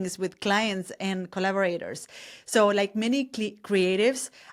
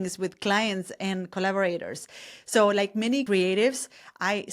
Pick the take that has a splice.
second; 1 cut; at 3.2 s

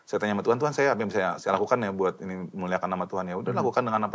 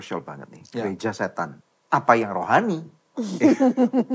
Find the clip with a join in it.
second; 1 cut; at 1.6 s

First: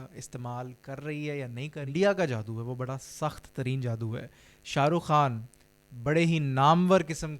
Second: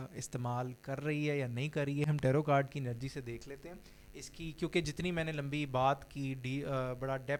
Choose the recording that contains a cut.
first; 1 cut; at 1.8 s

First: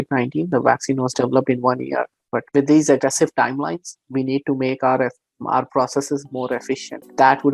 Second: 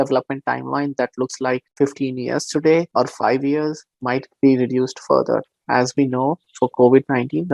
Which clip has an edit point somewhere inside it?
second; 3 cuts; at 1.7 s, 2.9 s, 3.9 s

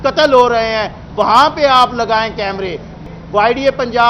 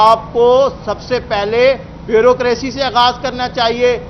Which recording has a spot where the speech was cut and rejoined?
first; 1 cut; at 3.0 s

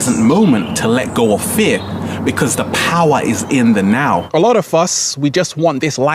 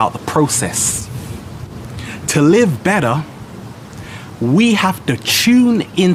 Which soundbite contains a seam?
first; 1 cut; at 4.3 s

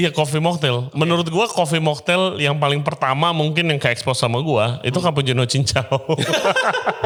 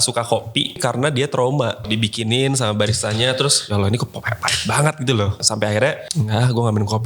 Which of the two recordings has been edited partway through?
second; 5 cuts; at 0.8 s, 1.8 s, 3.6 s, 5.4 s, 6.0 s

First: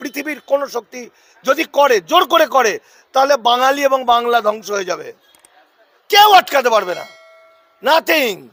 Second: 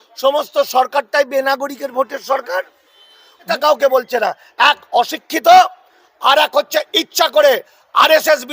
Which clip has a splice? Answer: second; 1 cut; at 3.5 s

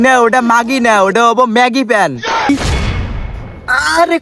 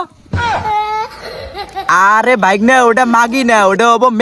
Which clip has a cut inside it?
first; 1 cut; at 2.5 s

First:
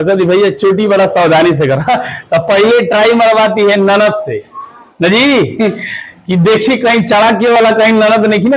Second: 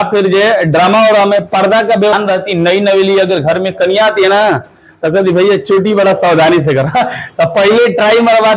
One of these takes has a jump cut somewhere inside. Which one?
second; 1 cut; at 2.1 s

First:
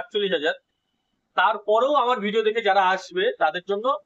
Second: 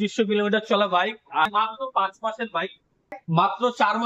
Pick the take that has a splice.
second; 2 cuts; at 1.5 s, 3.2 s

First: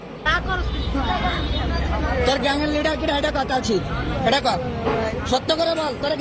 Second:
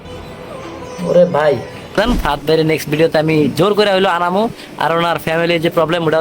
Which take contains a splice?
second; 1 cut; at 2.0 s

